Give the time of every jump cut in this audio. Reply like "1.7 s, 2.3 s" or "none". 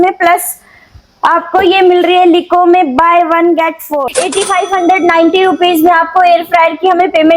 4.0 s